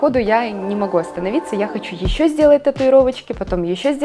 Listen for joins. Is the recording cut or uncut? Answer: uncut